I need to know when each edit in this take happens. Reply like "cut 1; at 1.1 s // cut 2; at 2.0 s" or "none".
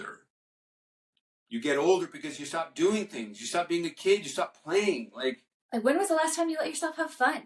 cut 1; at 5.5 s